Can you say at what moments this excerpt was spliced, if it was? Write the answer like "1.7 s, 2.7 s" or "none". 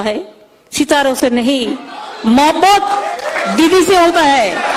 none